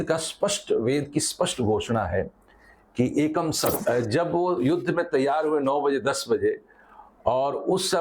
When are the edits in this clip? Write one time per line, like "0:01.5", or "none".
0:03.8